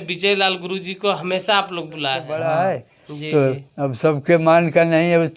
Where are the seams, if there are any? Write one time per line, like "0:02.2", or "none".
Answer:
0:02.2